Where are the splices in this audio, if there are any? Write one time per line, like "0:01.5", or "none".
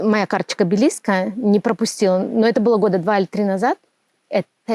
none